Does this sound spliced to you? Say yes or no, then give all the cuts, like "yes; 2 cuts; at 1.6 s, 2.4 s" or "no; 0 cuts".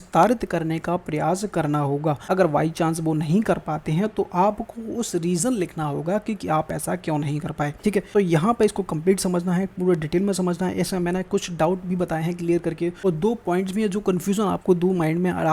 yes; 3 cuts; at 2.2 s, 8.0 s, 13.0 s